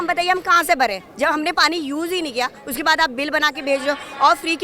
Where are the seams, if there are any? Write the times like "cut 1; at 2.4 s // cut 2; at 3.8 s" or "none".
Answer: none